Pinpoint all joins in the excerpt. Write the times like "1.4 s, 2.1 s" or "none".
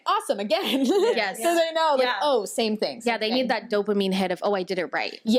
none

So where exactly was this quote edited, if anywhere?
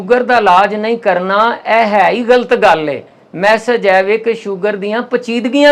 none

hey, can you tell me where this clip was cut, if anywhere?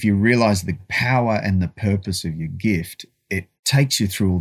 0.9 s, 3.5 s

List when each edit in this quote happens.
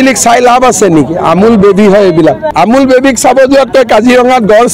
2.4 s

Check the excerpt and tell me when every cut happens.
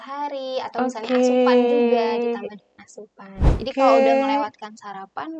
3.6 s

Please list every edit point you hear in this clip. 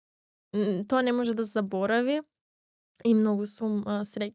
none

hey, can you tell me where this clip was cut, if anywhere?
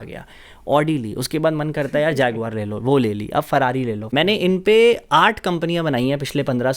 4.1 s

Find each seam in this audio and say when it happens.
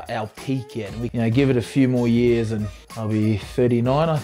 1.1 s, 2.8 s

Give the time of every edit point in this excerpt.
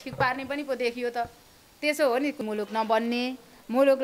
2.4 s

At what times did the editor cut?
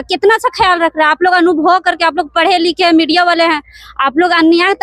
none

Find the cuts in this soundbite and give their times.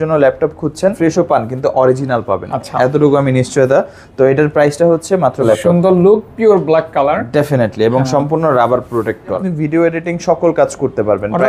1.0 s, 5.4 s, 9.4 s

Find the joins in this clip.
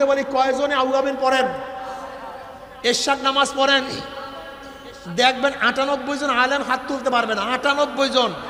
none

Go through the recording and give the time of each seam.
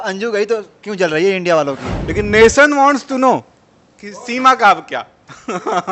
1.9 s

